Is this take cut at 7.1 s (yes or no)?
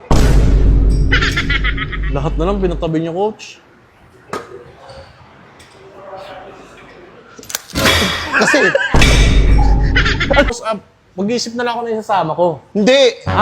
no